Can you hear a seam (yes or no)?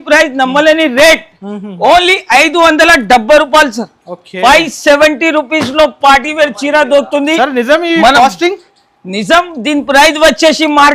no